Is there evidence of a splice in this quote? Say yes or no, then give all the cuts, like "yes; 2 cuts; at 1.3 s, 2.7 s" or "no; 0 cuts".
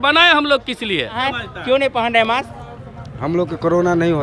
no; 0 cuts